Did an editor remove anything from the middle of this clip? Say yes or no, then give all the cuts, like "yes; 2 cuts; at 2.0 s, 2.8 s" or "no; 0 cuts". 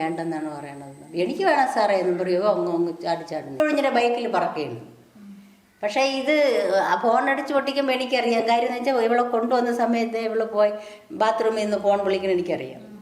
yes; 1 cut; at 3.5 s